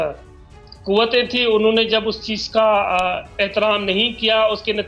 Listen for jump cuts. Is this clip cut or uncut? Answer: uncut